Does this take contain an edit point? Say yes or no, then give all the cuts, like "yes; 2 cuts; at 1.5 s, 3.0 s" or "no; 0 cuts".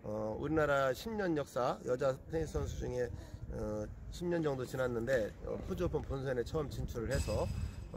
no; 0 cuts